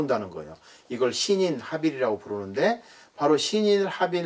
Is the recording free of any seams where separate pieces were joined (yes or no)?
yes